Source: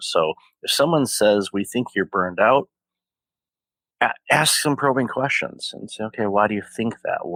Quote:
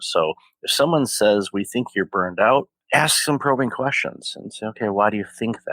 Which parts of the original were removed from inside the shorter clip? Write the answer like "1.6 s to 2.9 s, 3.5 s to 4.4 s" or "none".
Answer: 2.8 s to 4.2 s